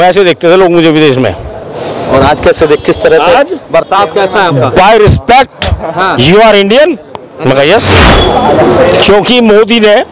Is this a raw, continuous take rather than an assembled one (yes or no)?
no